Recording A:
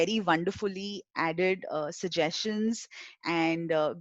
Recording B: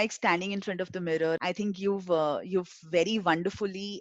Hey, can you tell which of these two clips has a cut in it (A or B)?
B